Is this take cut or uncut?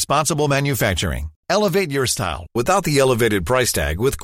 uncut